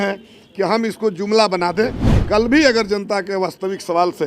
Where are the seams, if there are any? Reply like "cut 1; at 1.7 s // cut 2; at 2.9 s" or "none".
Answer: cut 1; at 2.0 s